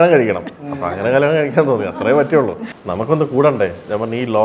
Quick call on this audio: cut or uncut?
cut